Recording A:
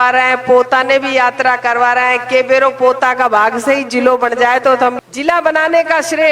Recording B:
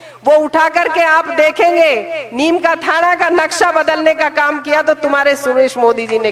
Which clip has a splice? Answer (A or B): A